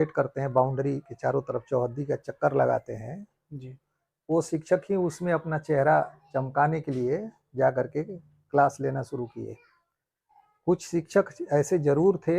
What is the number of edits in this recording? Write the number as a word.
zero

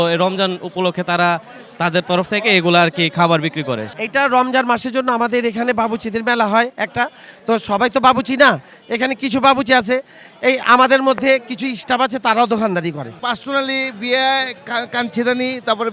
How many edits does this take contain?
two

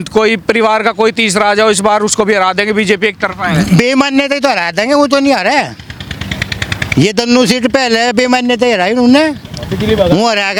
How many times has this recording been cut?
zero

